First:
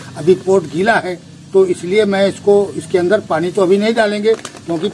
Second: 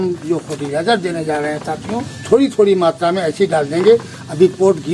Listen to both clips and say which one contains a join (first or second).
second